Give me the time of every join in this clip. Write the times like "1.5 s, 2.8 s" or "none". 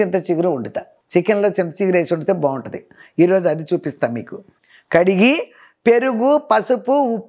4.5 s